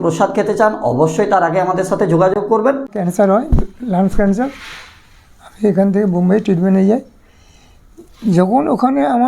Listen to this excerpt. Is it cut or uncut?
cut